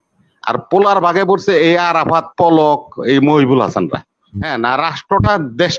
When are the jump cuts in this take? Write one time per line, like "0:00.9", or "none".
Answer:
0:04.5